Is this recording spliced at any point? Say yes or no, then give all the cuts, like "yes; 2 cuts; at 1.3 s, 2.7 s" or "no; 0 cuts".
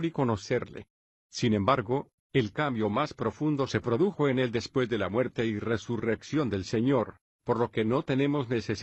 yes; 1 cut; at 5.3 s